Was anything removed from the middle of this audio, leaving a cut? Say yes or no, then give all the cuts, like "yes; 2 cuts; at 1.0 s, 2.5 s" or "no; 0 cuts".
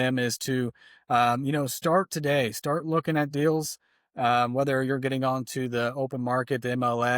no; 0 cuts